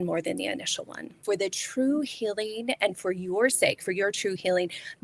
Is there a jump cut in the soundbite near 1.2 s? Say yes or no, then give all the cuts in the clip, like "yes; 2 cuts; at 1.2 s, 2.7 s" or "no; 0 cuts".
yes; 1 cut; at 1.2 s